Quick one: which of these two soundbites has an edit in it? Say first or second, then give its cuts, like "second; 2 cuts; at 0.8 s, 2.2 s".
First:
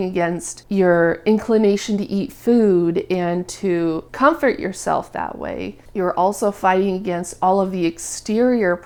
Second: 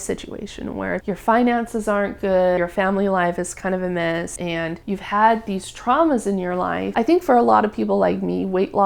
second; 4 cuts; at 1.0 s, 2.6 s, 4.5 s, 6.8 s